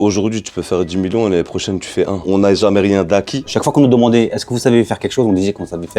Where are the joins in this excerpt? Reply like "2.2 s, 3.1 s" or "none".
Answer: 2.2 s, 3.5 s